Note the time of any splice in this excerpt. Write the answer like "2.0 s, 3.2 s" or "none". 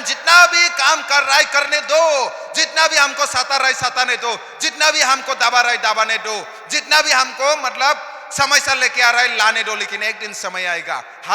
none